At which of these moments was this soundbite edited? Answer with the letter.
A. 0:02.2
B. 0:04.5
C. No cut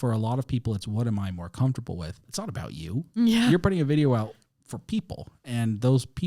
A